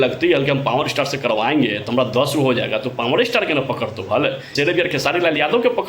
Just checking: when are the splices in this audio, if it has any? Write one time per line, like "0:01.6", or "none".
0:04.4